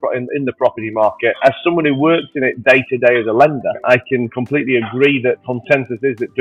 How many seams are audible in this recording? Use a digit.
3